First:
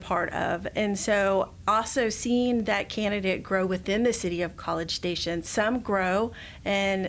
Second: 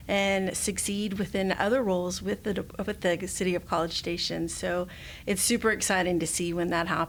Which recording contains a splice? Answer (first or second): first